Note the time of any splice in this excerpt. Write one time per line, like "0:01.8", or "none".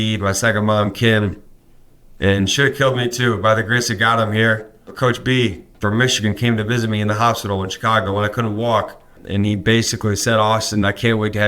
0:04.8
0:05.7
0:09.2